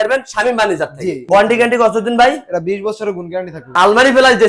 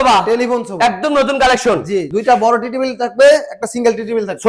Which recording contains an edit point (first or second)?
first